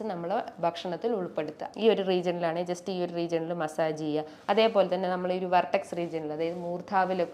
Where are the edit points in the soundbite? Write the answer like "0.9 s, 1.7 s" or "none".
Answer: 1.6 s